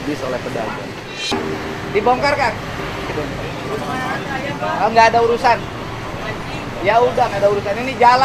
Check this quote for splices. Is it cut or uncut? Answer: cut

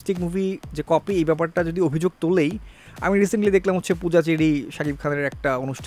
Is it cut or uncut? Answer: uncut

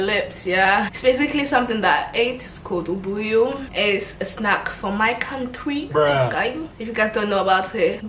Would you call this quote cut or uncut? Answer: uncut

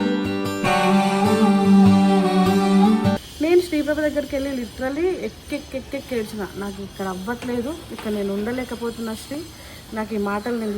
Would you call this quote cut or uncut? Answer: cut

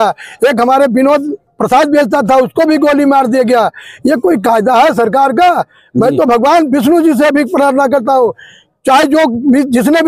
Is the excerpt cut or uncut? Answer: uncut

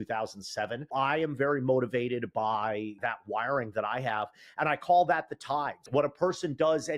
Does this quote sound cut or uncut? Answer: cut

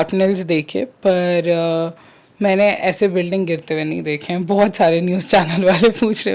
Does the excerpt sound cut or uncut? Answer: uncut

